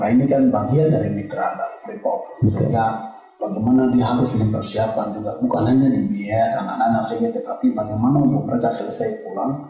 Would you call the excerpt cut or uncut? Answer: uncut